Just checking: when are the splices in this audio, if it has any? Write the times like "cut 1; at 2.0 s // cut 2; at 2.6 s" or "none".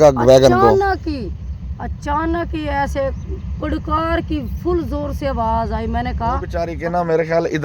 cut 1; at 6.7 s